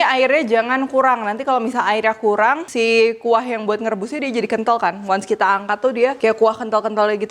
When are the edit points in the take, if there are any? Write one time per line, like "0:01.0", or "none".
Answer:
0:02.7
0:06.2